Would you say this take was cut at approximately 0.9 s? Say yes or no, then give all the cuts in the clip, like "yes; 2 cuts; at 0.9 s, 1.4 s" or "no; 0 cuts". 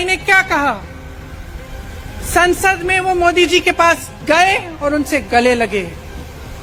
no; 0 cuts